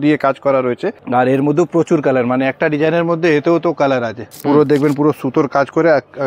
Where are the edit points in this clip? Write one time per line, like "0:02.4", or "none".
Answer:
0:01.0
0:04.2